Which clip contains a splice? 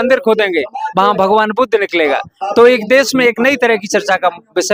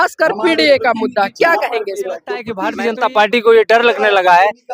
second; 1 cut; at 2.6 s

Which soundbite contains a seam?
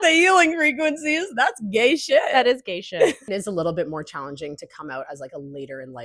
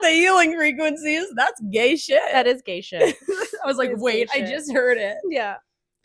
first; 1 cut; at 3.2 s

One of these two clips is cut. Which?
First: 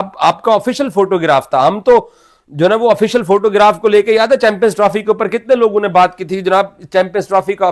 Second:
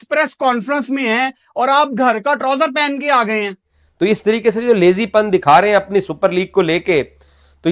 second; 1 cut; at 4.2 s

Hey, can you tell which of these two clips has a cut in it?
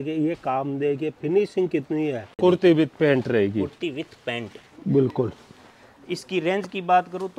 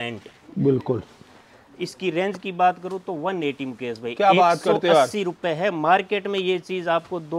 first; 1 cut; at 2.3 s

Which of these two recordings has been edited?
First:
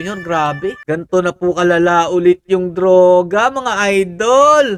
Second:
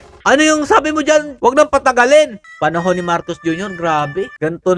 second; 1 cut; at 2.4 s

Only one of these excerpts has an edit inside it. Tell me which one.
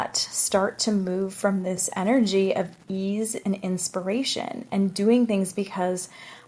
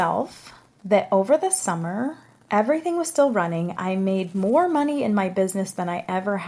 first; 1 cut; at 1.9 s

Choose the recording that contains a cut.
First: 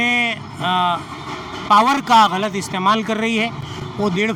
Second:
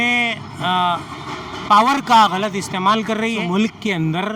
second; 1 cut; at 3.4 s

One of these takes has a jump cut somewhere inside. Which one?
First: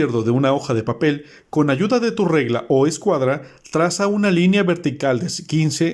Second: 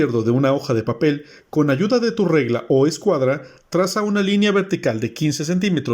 second; 1 cut; at 3.5 s

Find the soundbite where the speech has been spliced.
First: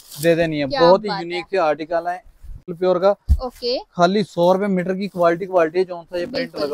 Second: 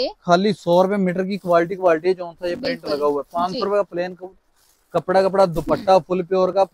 first; 1 cut; at 2.6 s

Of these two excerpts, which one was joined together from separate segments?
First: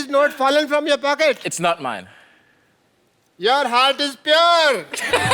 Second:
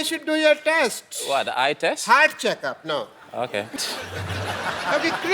second; 1 cut; at 3.8 s

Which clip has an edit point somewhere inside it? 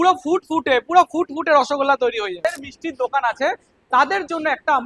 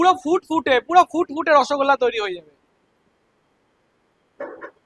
first; 1 cut; at 2.4 s

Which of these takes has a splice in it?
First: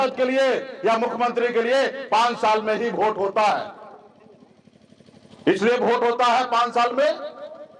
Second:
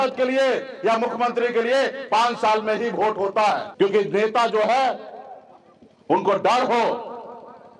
second; 1 cut; at 3.7 s

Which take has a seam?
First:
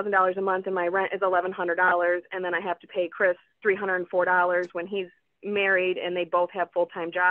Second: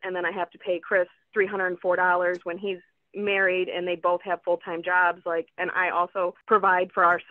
second; 1 cut; at 6.4 s

